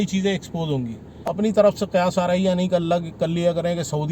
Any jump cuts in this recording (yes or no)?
yes